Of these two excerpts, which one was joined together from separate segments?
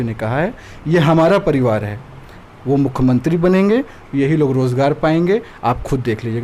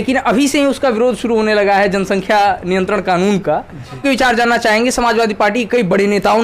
second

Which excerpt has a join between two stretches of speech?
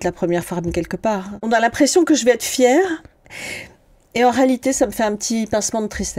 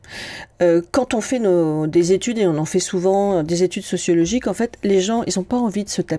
first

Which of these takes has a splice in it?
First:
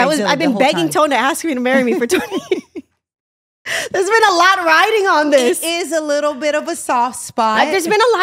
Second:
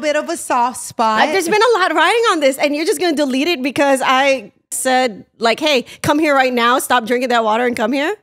second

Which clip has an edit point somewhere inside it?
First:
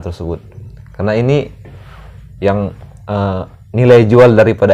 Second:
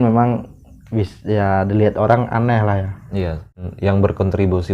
second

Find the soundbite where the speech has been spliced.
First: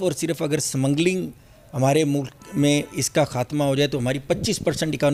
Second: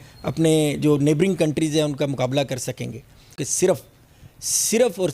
second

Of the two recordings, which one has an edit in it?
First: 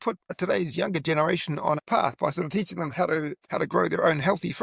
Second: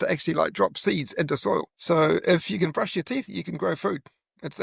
first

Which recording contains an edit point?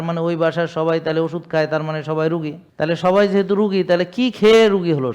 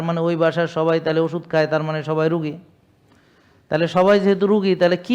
first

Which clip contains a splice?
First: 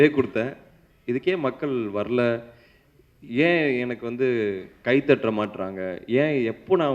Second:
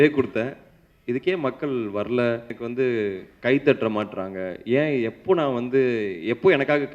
second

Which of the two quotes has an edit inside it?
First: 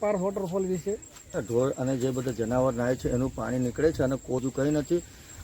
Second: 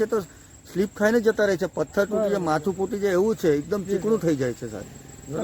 first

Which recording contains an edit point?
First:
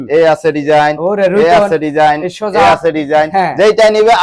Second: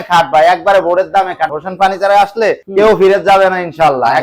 second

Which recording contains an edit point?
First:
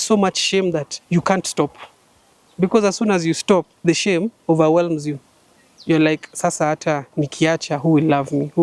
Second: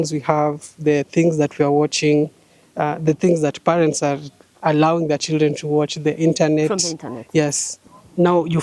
second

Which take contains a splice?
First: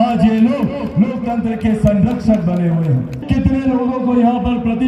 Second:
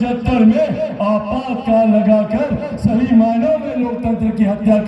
first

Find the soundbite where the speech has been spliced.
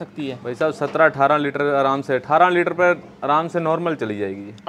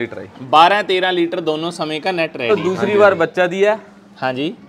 second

